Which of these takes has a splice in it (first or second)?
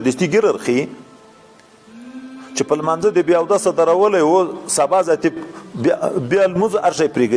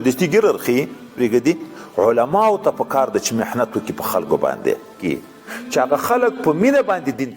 second